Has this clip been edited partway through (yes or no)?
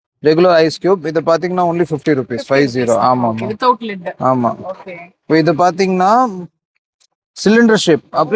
no